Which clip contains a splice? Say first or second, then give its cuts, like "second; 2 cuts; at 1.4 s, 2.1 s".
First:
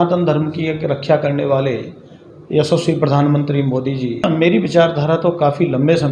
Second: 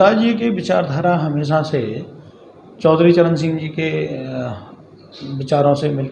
first; 1 cut; at 4.2 s